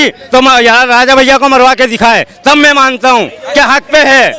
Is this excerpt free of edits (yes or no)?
yes